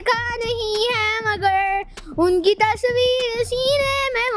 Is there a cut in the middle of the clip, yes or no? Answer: no